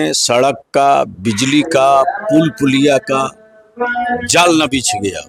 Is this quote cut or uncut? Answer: uncut